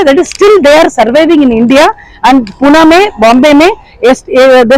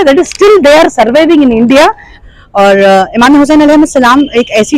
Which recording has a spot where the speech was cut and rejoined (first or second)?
second